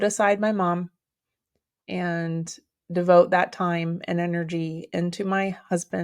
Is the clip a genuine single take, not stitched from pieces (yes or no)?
yes